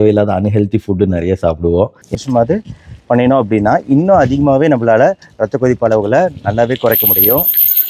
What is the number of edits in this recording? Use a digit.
1